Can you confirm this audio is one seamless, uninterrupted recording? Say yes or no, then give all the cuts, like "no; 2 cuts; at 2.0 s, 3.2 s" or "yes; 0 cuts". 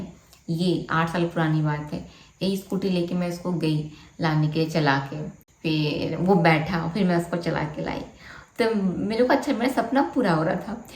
yes; 0 cuts